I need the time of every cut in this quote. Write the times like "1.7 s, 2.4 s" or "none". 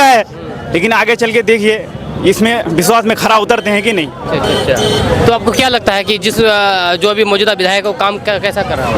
none